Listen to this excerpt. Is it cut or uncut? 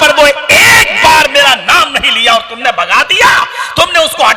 uncut